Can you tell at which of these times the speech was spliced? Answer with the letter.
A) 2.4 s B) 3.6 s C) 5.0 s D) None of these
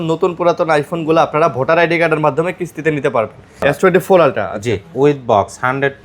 B